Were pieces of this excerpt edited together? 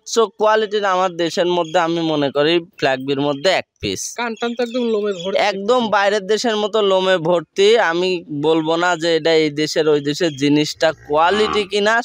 no; 0 cuts

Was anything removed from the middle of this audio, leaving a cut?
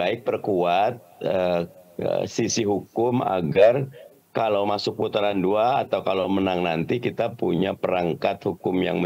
no; 0 cuts

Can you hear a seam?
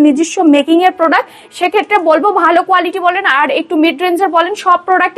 no; 0 cuts

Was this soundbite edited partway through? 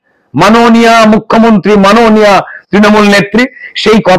no; 0 cuts

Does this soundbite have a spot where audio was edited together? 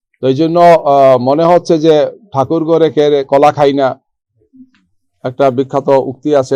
no; 0 cuts

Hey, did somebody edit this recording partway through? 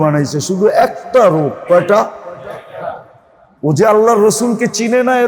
no; 0 cuts

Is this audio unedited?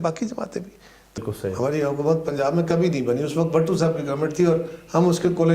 no; 1 cut; at 1.2 s

